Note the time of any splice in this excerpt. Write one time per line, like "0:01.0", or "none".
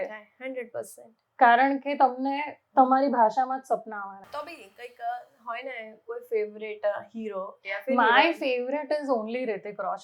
0:04.2